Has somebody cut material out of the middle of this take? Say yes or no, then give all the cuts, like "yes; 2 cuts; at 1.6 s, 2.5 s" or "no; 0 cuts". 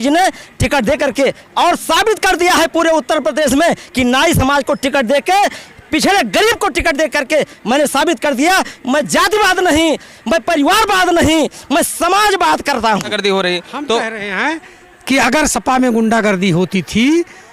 yes; 1 cut; at 13.1 s